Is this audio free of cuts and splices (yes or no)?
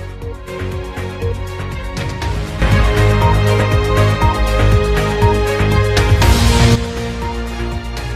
yes